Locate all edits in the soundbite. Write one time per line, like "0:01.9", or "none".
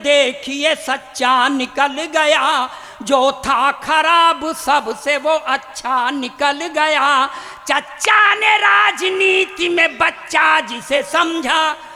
none